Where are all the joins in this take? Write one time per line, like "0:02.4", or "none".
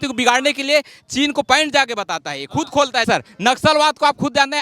0:03.1